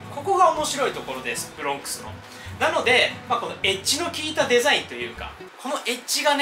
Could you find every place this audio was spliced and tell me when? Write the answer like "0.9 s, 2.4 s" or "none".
none